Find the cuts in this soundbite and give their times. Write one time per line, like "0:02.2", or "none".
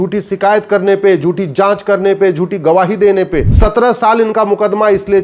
0:03.5